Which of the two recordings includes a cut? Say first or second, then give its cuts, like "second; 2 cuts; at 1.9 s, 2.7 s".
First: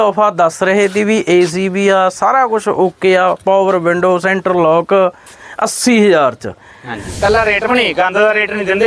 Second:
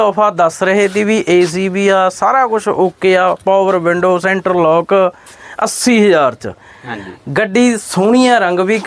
first; 1 cut; at 7.0 s